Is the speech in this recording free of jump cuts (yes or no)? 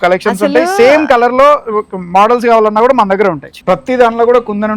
no